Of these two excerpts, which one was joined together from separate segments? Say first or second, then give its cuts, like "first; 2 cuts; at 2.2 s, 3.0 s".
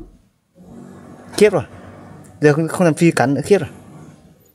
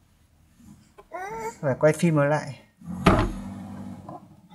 first; 1 cut; at 1.0 s